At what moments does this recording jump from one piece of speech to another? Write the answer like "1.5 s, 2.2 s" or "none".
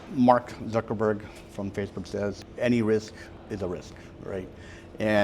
2.4 s